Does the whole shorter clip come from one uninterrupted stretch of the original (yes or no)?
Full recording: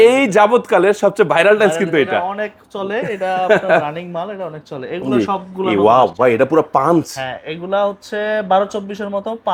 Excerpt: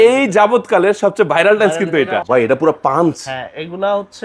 no